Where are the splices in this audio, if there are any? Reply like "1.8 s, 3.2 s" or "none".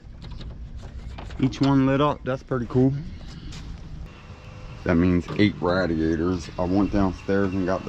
3.9 s